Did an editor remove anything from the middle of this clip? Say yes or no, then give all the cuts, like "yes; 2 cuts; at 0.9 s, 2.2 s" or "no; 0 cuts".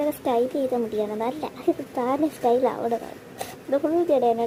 no; 0 cuts